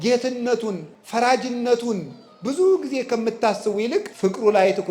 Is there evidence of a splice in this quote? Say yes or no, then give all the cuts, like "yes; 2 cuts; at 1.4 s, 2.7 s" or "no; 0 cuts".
yes; 2 cuts; at 0.9 s, 4.1 s